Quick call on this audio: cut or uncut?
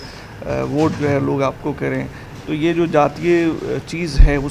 uncut